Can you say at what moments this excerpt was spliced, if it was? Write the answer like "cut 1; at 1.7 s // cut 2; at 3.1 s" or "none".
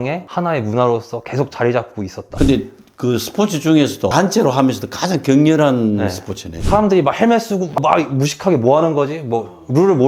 cut 1; at 2.3 s // cut 2; at 6.6 s